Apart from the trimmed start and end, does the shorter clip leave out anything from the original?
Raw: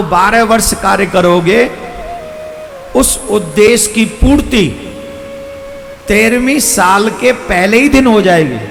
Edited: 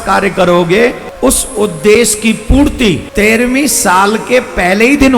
yes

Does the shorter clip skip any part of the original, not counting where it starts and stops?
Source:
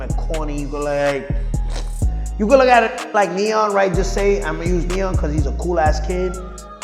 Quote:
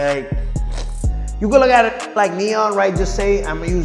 no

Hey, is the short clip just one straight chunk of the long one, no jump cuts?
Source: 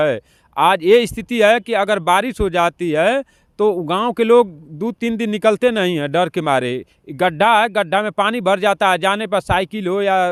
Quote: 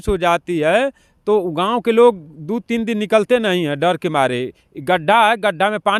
yes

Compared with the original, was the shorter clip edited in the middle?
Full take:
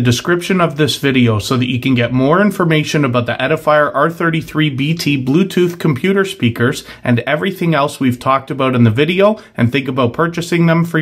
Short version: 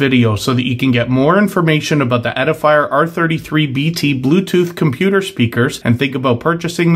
yes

